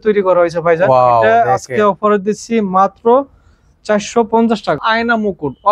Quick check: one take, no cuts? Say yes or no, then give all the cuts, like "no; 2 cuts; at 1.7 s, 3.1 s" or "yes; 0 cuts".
no; 1 cut; at 4.8 s